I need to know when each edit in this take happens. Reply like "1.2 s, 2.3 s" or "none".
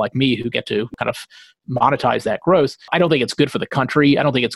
0.9 s, 2.9 s